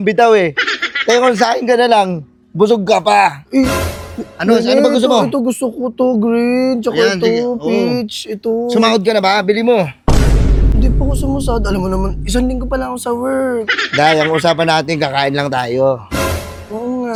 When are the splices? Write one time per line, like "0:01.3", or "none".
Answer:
none